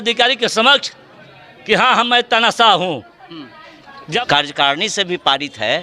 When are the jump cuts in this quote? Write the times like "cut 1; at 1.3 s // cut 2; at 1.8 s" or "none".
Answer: cut 1; at 4.2 s